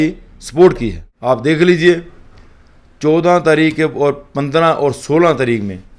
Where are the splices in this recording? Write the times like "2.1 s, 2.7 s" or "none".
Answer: 1.1 s